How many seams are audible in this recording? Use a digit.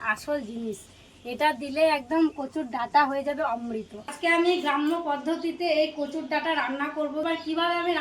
2